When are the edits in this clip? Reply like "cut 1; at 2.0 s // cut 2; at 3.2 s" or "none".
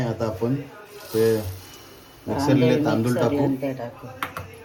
none